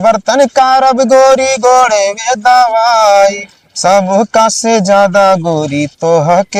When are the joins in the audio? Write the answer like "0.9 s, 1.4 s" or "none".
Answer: none